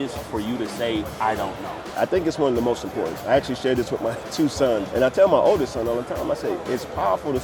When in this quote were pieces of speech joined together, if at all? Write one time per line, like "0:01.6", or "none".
0:01.9
0:03.2
0:04.9